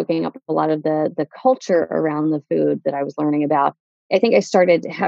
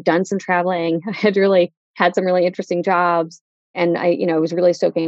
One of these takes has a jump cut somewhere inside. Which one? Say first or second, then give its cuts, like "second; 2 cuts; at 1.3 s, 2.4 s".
second; 1 cut; at 1.8 s